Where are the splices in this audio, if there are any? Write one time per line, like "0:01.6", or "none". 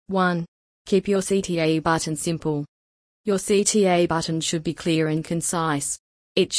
0:01.2
0:02.5